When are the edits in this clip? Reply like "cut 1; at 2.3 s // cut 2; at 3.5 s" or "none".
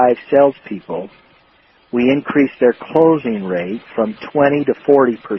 none